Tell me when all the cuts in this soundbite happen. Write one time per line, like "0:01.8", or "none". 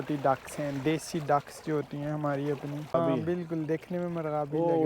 0:02.9